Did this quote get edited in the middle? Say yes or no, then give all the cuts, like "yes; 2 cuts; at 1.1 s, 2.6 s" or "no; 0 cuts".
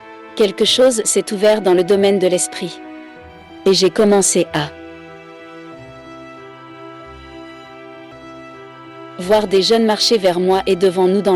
yes; 1 cut; at 8.1 s